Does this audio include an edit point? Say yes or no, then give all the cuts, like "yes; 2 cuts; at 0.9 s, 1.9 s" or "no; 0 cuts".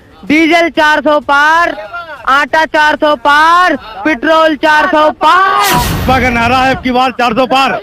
yes; 1 cut; at 6.0 s